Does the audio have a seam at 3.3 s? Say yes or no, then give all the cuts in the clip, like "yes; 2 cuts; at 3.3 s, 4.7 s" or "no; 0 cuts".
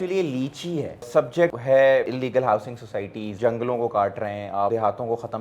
yes; 4 cuts; at 1.0 s, 2.1 s, 3.3 s, 4.7 s